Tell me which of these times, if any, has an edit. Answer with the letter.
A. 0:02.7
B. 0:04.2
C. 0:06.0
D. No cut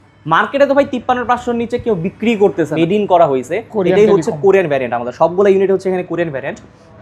A